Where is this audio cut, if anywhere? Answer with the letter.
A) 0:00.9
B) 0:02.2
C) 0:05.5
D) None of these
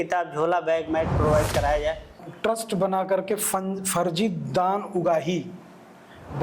B